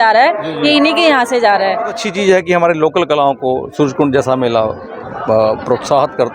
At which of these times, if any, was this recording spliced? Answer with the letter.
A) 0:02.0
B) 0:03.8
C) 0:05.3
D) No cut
A